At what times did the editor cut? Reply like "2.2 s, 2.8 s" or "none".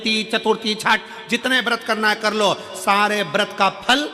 none